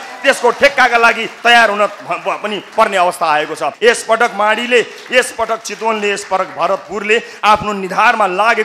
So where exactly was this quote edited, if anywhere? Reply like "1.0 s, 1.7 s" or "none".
3.7 s